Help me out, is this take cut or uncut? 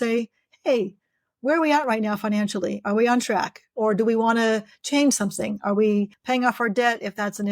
cut